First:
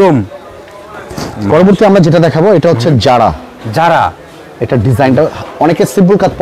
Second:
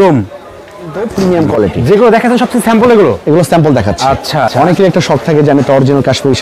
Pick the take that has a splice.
second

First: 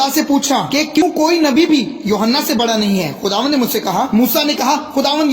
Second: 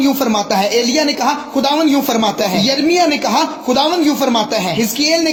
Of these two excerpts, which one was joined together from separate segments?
first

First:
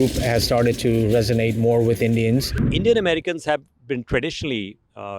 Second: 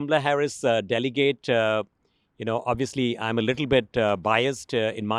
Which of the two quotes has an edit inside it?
first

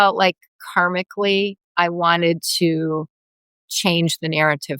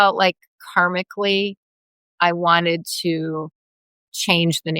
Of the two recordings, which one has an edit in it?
first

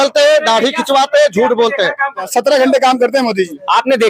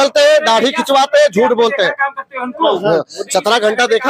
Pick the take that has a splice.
first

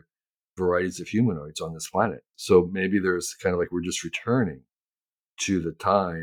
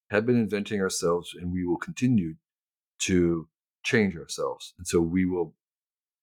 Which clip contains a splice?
first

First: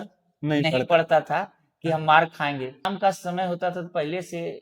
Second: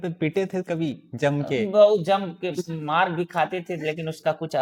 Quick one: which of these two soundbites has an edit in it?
first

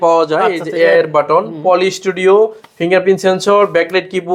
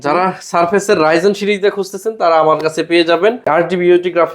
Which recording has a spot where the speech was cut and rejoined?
second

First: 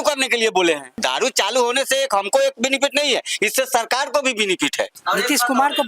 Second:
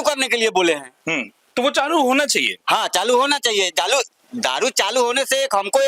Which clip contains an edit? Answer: first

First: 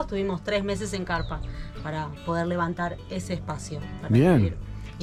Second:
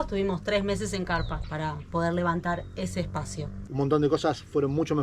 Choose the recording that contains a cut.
second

